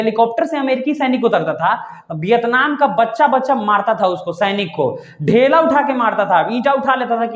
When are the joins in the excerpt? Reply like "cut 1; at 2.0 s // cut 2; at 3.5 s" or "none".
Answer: none